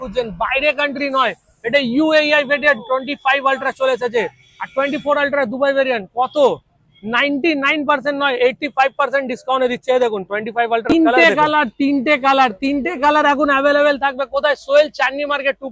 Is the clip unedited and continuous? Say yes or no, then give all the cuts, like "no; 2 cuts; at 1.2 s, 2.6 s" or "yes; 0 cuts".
no; 1 cut; at 10.8 s